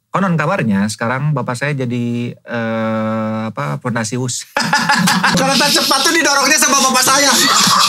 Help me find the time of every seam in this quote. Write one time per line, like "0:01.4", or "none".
0:05.3